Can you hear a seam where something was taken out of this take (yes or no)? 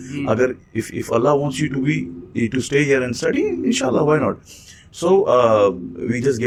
no